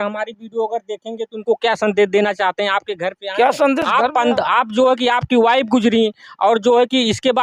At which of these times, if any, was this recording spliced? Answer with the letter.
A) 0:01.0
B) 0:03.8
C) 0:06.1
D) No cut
D